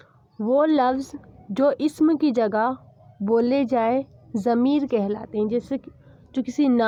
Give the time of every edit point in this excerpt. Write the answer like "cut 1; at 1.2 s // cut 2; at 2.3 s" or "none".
none

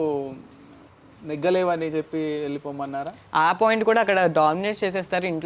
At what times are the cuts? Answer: cut 1; at 3.1 s

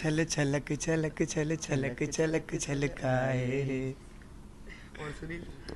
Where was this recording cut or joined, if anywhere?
none

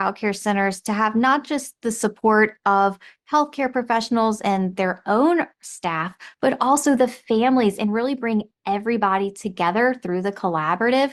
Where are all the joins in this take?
none

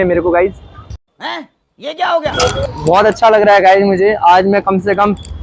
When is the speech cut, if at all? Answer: cut 1; at 2.6 s

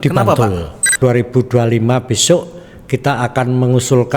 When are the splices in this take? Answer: cut 1; at 0.9 s

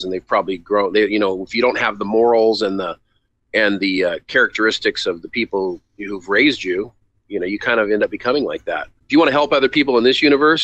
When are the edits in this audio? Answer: cut 1; at 8.9 s

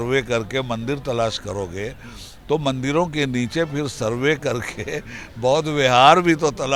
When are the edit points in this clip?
none

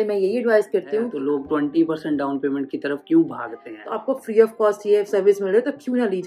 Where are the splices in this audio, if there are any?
cut 1; at 1.1 s // cut 2; at 3.8 s

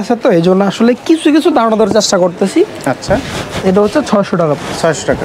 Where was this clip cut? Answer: none

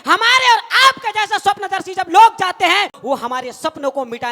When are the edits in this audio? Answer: cut 1; at 2.9 s

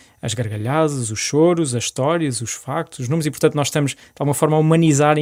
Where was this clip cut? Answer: none

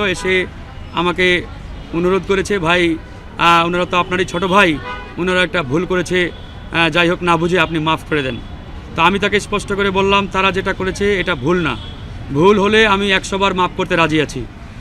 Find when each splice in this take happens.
none

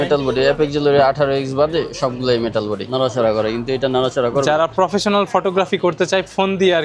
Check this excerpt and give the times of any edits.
cut 1; at 2.9 s

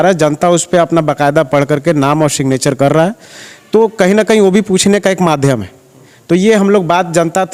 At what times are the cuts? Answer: none

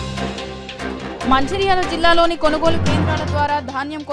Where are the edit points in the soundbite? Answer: cut 1; at 1.3 s

